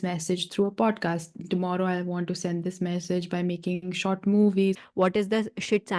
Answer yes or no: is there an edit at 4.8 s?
yes